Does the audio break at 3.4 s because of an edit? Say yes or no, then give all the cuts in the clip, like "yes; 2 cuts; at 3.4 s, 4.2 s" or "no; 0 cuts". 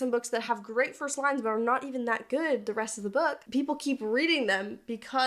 yes; 1 cut; at 3.4 s